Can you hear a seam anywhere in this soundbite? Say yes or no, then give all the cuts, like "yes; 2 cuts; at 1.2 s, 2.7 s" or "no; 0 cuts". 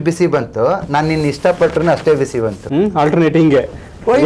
yes; 1 cut; at 2.6 s